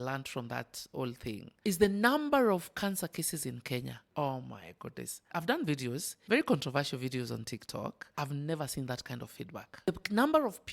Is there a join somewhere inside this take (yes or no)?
yes